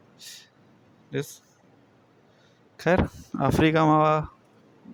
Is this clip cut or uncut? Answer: uncut